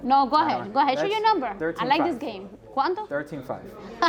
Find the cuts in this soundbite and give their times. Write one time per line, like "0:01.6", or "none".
none